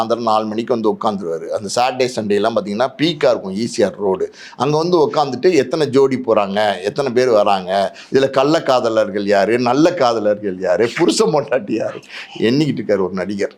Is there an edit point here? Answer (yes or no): no